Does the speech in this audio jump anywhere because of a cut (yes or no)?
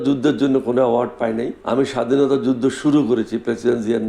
yes